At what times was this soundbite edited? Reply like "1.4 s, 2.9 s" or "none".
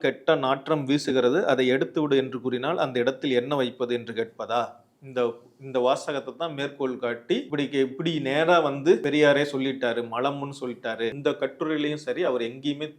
7.5 s, 9.0 s, 11.2 s